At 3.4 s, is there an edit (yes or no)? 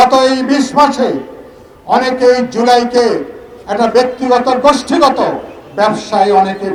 no